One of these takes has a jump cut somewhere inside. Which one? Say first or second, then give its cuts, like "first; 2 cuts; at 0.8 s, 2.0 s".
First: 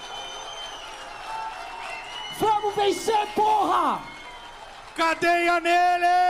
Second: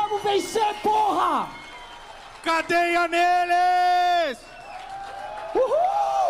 second; 1 cut; at 5.0 s